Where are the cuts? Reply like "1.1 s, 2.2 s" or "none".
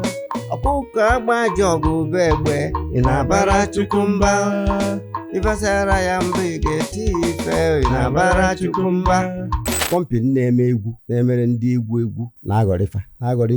9.8 s, 12.3 s